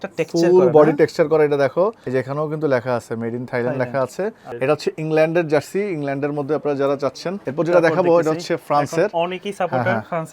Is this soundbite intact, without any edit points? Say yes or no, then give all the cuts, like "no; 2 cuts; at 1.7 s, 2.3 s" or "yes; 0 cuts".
no; 3 cuts; at 2.0 s, 4.4 s, 7.4 s